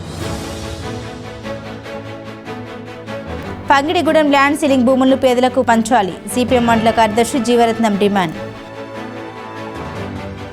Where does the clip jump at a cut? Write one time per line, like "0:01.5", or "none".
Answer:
none